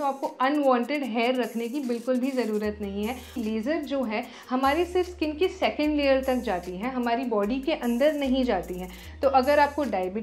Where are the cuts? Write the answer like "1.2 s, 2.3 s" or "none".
3.4 s